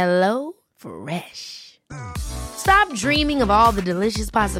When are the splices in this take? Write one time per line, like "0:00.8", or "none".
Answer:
none